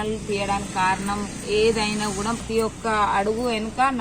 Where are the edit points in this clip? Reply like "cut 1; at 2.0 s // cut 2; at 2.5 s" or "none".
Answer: cut 1; at 2.4 s